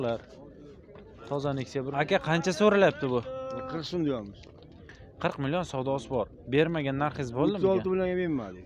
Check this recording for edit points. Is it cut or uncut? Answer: cut